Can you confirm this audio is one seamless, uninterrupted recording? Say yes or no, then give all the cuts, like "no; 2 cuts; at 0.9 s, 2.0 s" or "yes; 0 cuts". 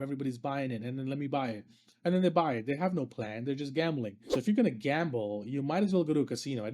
no; 1 cut; at 4.2 s